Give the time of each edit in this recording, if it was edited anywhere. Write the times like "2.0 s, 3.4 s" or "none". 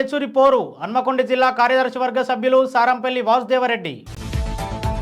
none